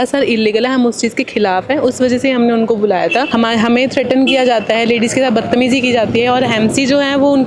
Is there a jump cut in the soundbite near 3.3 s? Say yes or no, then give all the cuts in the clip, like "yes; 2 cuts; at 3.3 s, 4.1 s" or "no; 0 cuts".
yes; 1 cut; at 3.3 s